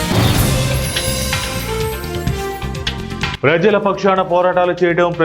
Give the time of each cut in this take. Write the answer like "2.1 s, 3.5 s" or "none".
3.4 s